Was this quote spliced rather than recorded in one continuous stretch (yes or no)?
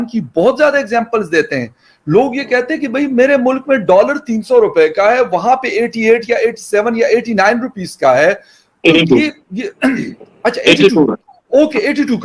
no